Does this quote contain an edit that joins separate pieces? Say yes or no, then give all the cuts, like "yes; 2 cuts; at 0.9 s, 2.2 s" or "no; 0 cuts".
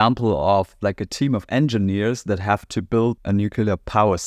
yes; 1 cut; at 3.2 s